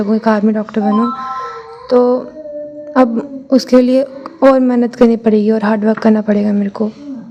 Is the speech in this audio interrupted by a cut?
no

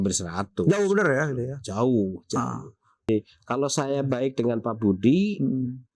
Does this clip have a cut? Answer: yes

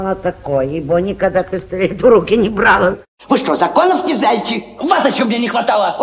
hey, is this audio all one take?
no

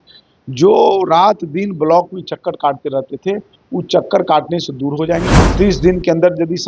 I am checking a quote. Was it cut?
yes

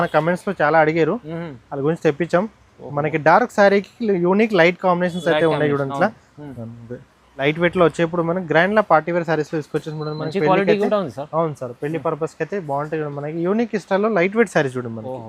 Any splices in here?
yes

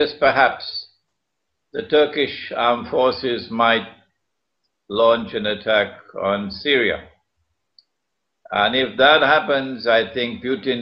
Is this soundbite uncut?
no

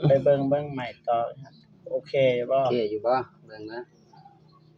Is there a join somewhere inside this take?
no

